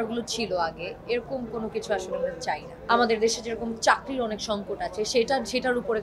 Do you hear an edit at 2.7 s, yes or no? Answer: yes